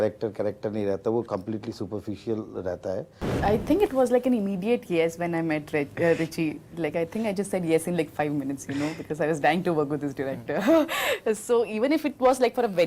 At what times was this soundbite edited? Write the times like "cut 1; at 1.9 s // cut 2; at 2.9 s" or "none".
cut 1; at 3.3 s